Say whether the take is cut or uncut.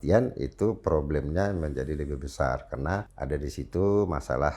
cut